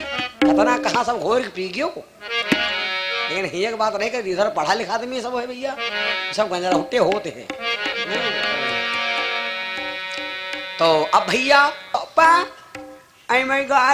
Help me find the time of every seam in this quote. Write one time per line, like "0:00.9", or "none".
0:12.0